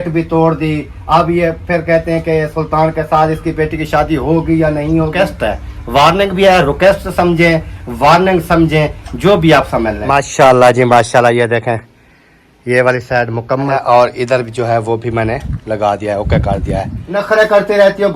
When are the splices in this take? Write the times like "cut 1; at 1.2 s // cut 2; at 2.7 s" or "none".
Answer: cut 1; at 5.1 s // cut 2; at 10.0 s // cut 3; at 13.8 s // cut 4; at 17.0 s